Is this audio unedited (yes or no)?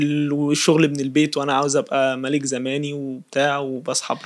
yes